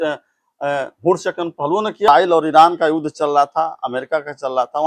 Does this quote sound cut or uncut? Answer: cut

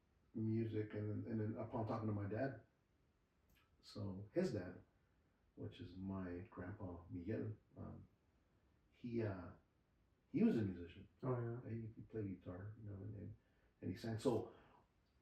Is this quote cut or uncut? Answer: uncut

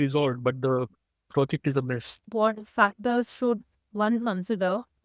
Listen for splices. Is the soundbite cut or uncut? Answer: cut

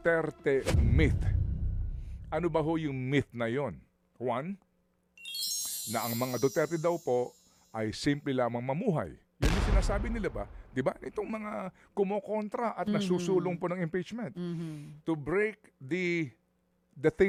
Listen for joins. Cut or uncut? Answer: uncut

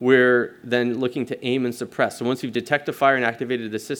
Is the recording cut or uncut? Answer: uncut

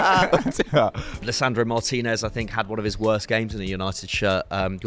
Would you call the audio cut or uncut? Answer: cut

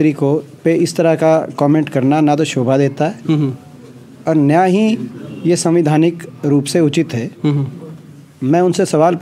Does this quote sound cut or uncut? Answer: uncut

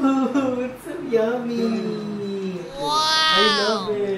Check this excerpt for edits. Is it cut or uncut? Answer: uncut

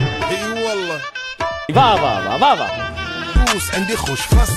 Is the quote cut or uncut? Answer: uncut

